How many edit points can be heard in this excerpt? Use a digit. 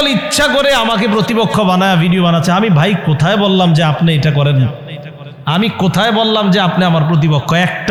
0